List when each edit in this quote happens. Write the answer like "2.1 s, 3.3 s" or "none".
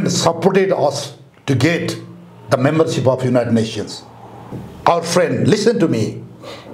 4.6 s